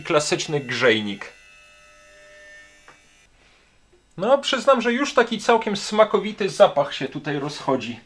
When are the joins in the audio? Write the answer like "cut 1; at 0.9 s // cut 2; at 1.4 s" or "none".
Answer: cut 1; at 3.2 s